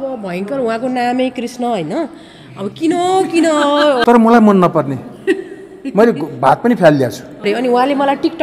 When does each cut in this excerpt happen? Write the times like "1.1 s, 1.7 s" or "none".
4.0 s, 7.4 s